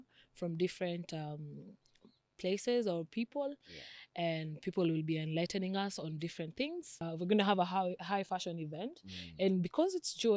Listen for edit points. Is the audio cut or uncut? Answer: cut